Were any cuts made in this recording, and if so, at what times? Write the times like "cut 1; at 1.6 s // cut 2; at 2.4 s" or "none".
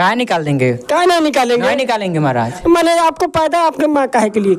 none

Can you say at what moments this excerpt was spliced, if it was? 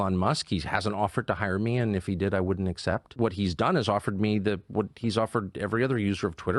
cut 1; at 3.1 s

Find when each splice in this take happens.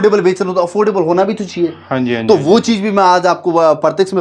none

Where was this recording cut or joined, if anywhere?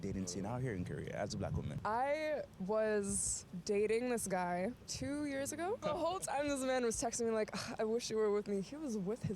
cut 1; at 1.7 s // cut 2; at 5.8 s

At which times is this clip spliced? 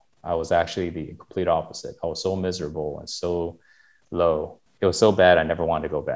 cut 1; at 4.6 s

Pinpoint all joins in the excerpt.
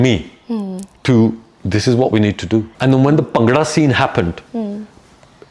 cut 1; at 2.7 s

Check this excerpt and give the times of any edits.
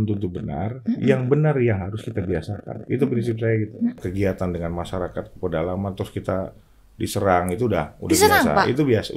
cut 1; at 4.0 s

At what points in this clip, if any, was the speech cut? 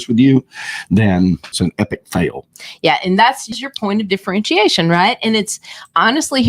cut 1; at 1.6 s // cut 2; at 3.5 s

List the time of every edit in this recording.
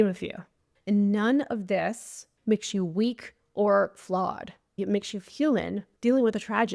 cut 1; at 2.3 s // cut 2; at 5.8 s

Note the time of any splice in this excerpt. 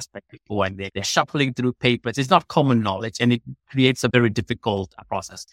cut 1; at 0.9 s // cut 2; at 4.1 s

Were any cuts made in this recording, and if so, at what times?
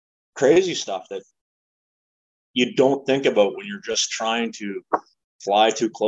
none

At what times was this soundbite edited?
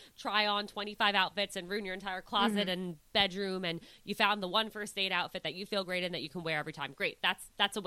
none

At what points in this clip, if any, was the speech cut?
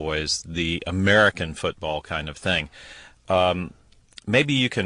cut 1; at 3.2 s

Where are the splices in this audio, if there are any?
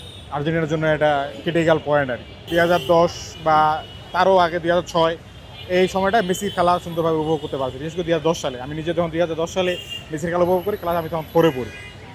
cut 1; at 2.4 s

